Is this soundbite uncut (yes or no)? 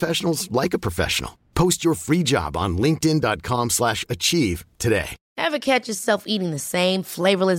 no